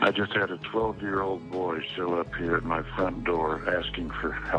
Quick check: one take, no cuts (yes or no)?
yes